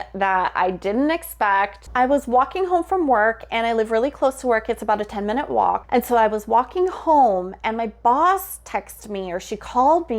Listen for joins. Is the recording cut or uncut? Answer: uncut